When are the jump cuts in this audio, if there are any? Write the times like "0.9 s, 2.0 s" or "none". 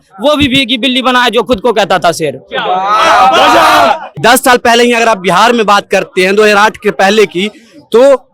4.1 s